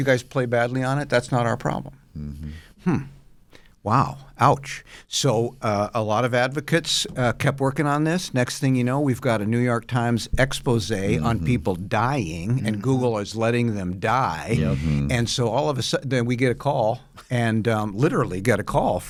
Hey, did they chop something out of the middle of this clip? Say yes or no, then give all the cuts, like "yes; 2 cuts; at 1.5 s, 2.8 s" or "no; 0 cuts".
no; 0 cuts